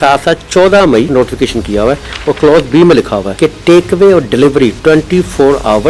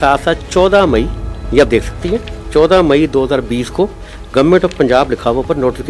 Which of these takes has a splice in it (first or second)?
first